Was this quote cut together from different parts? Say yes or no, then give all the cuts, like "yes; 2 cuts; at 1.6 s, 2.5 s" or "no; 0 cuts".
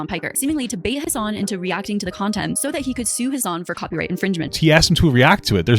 yes; 2 cuts; at 1.0 s, 4.5 s